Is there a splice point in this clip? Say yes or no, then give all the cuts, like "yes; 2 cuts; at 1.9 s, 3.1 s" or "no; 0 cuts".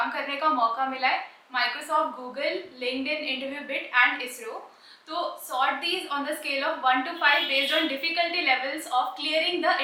no; 0 cuts